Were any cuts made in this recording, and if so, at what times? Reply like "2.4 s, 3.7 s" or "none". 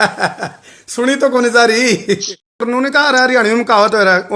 2.6 s